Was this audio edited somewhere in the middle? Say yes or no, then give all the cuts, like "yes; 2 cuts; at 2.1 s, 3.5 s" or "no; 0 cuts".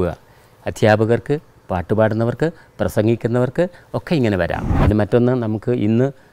yes; 1 cut; at 4.7 s